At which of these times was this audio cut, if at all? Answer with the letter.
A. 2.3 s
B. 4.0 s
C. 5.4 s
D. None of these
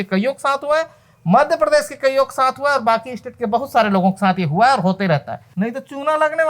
C